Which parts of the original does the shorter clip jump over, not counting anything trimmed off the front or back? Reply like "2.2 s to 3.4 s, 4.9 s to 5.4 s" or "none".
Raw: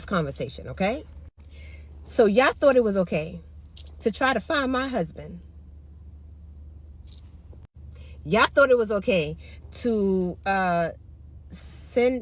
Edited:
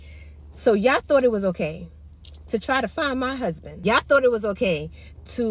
5.2 s to 8.1 s